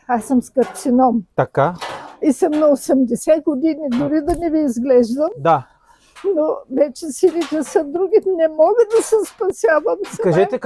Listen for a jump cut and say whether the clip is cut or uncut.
uncut